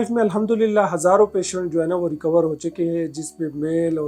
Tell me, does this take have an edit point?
no; 0 cuts

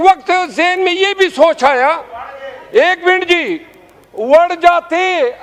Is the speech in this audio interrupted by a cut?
no; 0 cuts

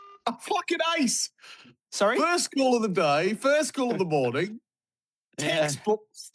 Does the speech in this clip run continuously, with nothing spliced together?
yes; 0 cuts

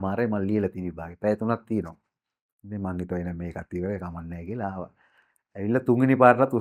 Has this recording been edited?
no; 0 cuts

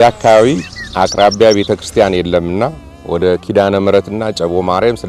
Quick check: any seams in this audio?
no; 0 cuts

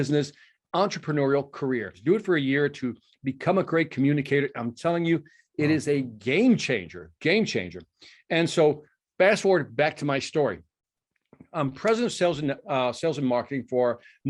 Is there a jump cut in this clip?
yes; 1 cut; at 1.9 s

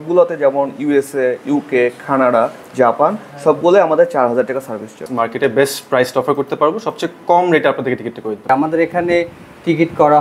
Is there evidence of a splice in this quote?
yes; 2 cuts; at 5.1 s, 8.5 s

